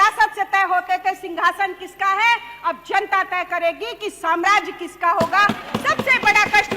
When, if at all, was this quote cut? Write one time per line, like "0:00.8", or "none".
none

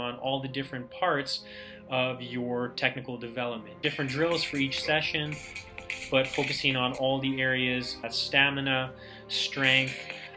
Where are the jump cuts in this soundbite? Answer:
0:03.8
0:08.2

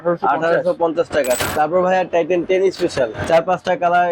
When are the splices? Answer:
0:01.4
0:03.2

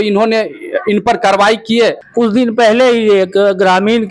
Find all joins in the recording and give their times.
0:02.0

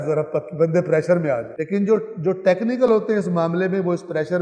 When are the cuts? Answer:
0:01.5

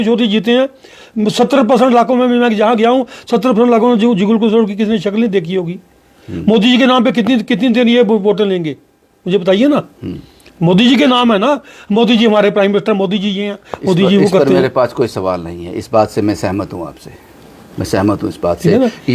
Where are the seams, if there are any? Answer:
none

